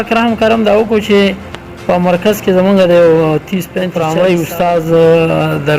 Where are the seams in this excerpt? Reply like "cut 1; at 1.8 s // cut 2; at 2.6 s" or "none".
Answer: cut 1; at 3.9 s